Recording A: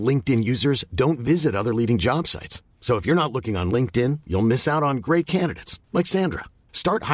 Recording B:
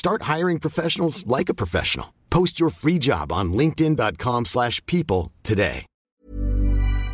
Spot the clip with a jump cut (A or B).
B